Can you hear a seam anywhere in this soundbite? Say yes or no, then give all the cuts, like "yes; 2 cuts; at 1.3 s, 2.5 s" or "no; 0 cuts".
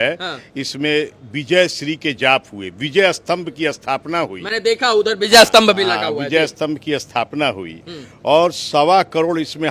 no; 0 cuts